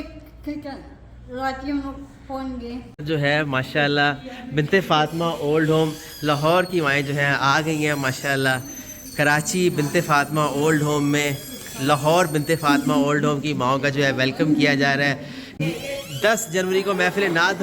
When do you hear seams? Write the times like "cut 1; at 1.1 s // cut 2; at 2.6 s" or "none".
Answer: cut 1; at 3.0 s // cut 2; at 15.4 s